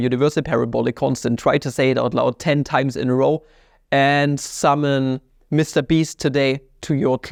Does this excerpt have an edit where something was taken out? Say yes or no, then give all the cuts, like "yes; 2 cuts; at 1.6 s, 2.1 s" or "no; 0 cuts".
no; 0 cuts